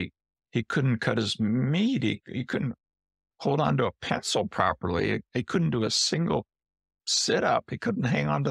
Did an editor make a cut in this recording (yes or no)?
no